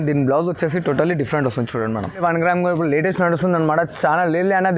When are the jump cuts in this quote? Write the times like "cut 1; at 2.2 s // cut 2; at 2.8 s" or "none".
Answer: cut 1; at 2.2 s